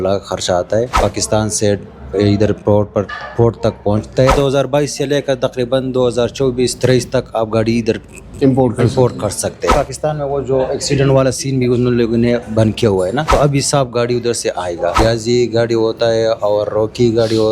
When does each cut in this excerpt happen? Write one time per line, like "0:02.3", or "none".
0:00.9
0:04.3
0:09.7
0:13.3
0:15.0